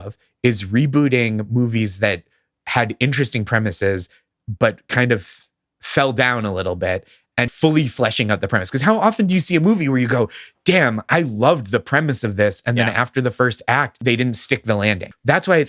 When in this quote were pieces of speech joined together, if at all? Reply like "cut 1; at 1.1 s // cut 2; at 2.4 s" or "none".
cut 1; at 7.5 s // cut 2; at 14.0 s